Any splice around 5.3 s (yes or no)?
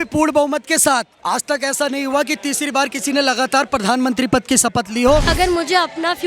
yes